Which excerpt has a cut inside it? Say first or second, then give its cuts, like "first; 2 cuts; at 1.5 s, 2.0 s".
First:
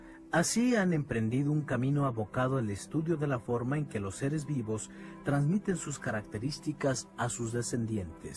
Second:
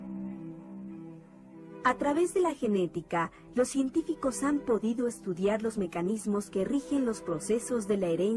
second; 1 cut; at 6.9 s